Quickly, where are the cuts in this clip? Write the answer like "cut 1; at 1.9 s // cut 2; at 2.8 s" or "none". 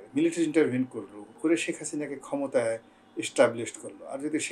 cut 1; at 1.2 s